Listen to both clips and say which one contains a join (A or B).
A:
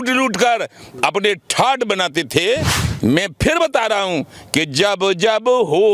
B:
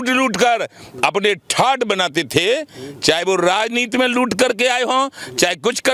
A